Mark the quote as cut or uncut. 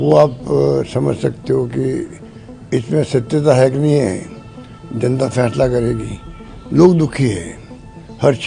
uncut